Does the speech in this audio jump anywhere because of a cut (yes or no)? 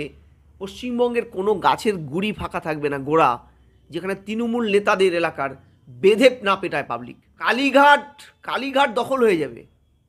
yes